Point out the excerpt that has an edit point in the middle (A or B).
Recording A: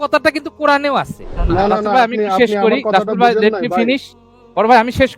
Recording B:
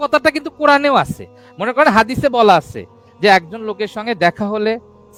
A